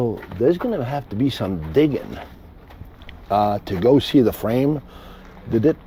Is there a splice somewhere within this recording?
no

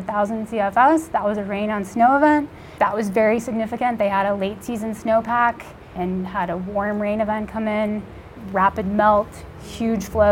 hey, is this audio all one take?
no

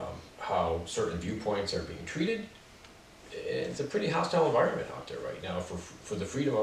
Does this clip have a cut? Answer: no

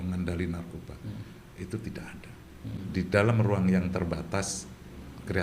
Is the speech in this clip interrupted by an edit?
yes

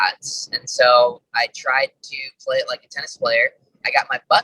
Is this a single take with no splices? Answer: no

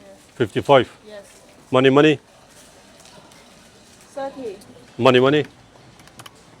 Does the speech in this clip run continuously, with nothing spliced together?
no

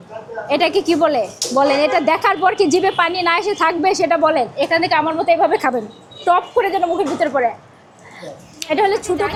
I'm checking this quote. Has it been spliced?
no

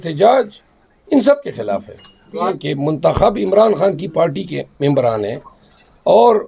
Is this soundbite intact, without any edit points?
no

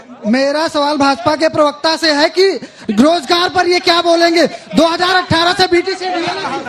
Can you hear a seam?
no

